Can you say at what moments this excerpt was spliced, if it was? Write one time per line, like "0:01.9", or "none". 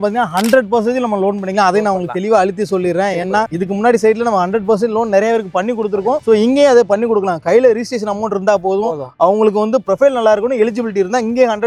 none